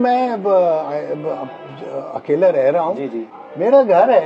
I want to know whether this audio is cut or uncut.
cut